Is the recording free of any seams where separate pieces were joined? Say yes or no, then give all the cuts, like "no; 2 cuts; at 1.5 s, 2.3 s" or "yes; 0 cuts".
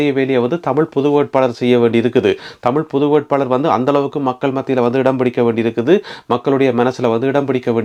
yes; 0 cuts